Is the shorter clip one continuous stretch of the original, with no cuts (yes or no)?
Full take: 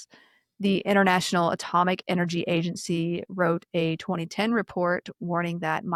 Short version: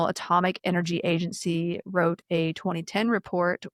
yes